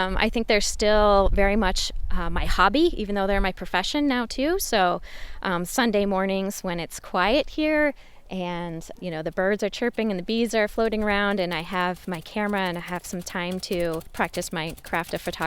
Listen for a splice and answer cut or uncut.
cut